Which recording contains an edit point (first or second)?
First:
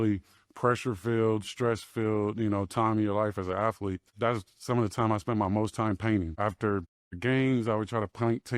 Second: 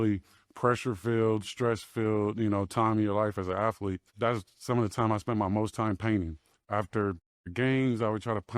first